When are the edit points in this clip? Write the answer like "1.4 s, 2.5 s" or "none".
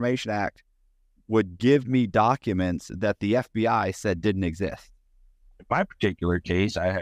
5.5 s